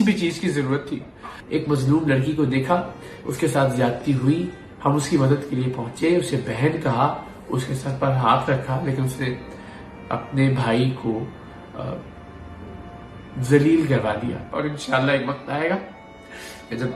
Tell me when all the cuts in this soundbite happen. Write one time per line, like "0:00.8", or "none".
0:01.3
0:14.5